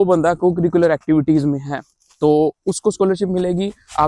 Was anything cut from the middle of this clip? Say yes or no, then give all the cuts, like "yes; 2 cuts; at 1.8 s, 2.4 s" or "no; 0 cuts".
no; 0 cuts